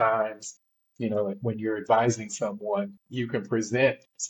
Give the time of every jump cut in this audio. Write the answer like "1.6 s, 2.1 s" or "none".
3.0 s